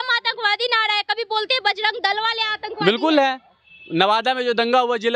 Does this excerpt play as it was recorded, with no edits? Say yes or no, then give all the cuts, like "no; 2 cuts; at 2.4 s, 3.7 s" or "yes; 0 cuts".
yes; 0 cuts